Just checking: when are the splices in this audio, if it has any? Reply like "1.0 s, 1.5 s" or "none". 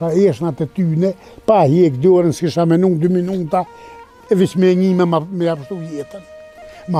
none